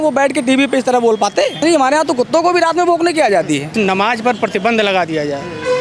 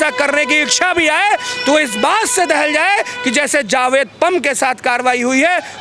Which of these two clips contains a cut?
first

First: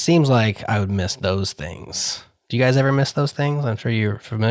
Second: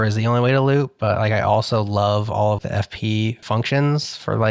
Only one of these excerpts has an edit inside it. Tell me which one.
second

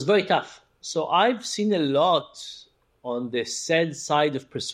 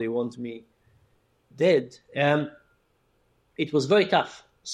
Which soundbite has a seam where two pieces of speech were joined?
second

